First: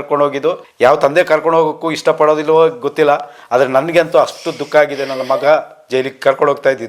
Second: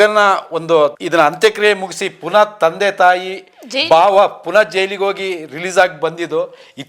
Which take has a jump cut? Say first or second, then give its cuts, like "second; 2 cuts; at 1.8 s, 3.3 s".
second; 1 cut; at 1.0 s